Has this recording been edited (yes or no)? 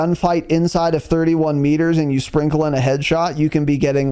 no